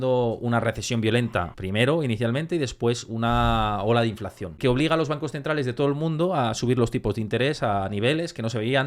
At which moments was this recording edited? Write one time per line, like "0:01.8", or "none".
0:01.6
0:04.6